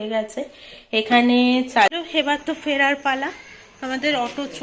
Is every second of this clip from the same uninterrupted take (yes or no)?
no